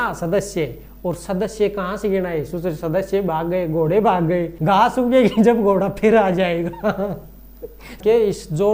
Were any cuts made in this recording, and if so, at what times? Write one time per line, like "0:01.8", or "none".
0:04.5
0:07.6